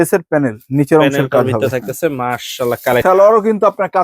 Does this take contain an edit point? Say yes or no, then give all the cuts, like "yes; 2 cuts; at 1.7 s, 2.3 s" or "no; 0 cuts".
yes; 1 cut; at 3.0 s